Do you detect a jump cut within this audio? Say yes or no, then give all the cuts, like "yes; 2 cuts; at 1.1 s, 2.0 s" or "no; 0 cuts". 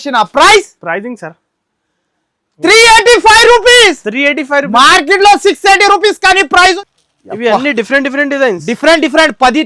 yes; 1 cut; at 6.8 s